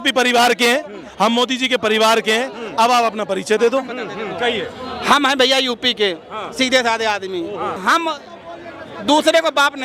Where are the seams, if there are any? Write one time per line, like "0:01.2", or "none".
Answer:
0:07.8

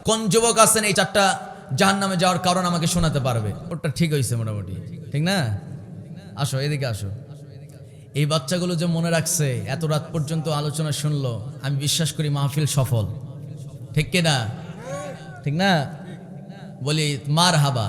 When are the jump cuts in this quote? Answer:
0:00.9
0:03.6

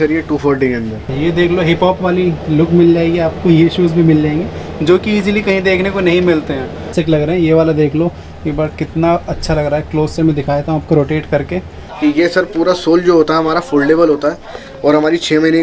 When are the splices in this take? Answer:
0:01.0
0:06.9
0:11.8

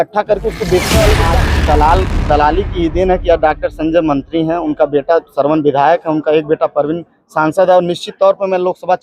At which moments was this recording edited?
0:01.4

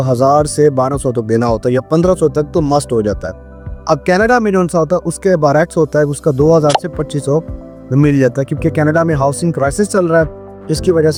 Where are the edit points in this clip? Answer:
none

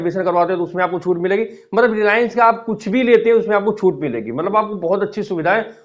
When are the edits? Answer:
none

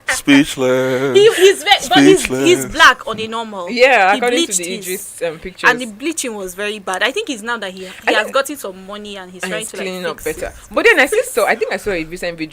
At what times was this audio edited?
none

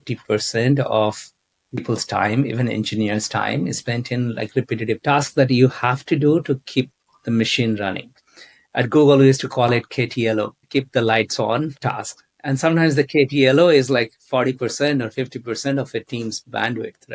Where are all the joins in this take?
0:05.0
0:10.6

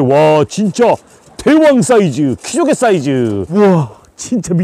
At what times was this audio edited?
0:03.4

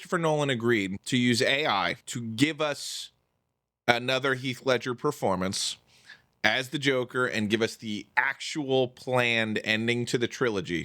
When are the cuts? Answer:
0:01.0
0:02.1

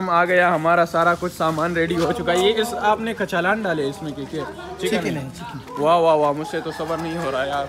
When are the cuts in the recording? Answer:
0:02.4

